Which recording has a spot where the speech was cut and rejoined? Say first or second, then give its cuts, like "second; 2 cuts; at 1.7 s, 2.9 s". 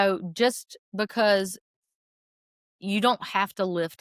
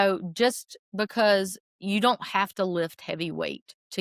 second; 1 cut; at 1.7 s